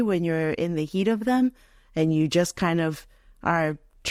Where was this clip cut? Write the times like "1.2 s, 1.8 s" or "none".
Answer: none